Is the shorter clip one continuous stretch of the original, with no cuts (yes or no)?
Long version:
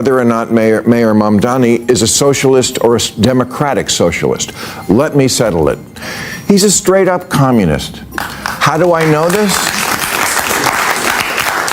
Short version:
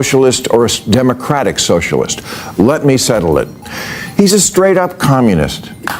yes